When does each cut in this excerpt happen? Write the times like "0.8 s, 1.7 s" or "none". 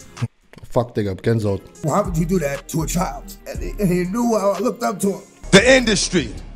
1.7 s, 5.3 s